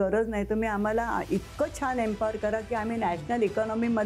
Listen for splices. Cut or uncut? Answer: uncut